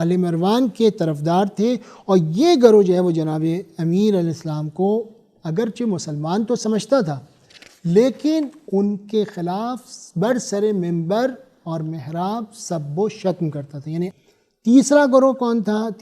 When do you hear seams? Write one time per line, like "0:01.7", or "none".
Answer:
0:14.2

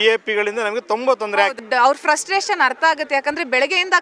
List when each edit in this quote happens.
0:01.6

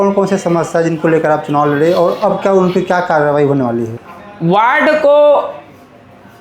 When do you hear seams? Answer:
0:03.9

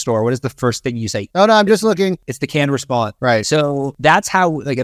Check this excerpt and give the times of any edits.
0:01.2
0:02.6
0:03.9

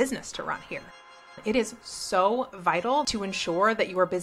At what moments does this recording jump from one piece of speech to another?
0:01.3
0:03.1

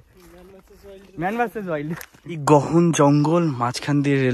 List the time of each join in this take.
0:02.4

